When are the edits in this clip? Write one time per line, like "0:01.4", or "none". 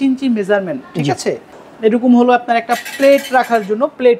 0:01.6